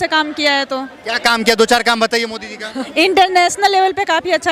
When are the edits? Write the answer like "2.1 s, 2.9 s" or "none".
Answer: 2.8 s